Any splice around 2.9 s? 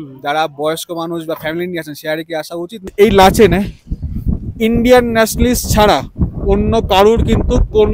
yes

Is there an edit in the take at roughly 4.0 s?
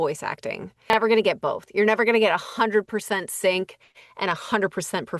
no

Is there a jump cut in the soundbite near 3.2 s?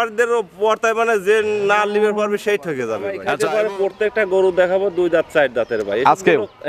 yes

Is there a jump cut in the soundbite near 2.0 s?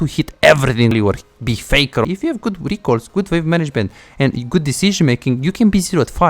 yes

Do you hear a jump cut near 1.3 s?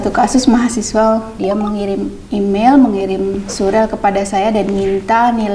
yes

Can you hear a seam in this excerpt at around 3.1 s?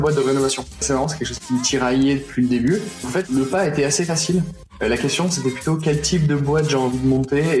yes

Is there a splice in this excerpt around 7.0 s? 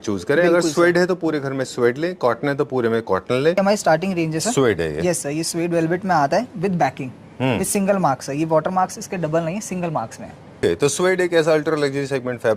no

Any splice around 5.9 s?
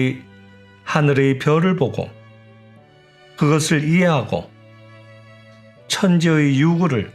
yes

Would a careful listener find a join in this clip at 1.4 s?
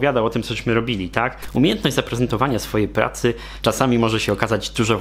yes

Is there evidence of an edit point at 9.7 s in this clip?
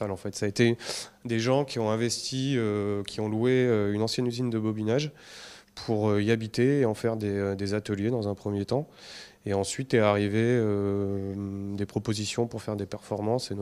yes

